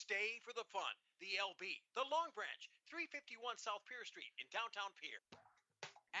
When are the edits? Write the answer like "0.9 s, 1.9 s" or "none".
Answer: 5.1 s